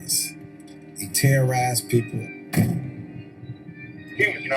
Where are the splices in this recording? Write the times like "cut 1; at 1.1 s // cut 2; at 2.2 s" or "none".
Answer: cut 1; at 1.3 s